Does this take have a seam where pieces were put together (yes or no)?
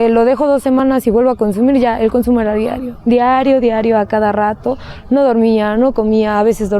no